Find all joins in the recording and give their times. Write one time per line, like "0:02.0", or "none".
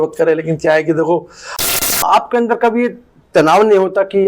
0:01.5